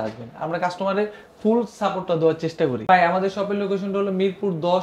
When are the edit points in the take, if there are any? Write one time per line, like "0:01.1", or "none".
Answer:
0:02.8